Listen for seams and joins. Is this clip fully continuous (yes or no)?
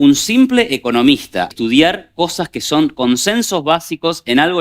no